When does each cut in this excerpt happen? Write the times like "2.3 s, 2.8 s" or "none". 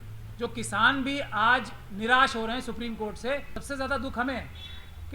3.6 s